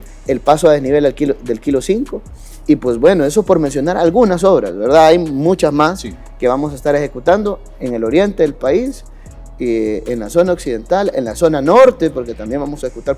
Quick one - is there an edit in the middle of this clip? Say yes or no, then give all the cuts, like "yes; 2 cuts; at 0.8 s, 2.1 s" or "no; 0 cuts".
no; 0 cuts